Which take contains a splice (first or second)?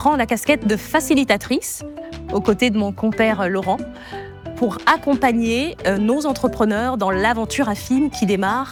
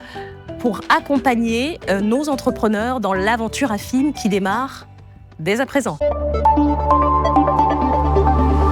second